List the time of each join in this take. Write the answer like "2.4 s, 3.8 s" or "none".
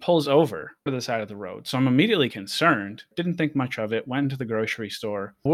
0.9 s, 3.0 s